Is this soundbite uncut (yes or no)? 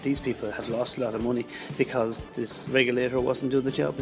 no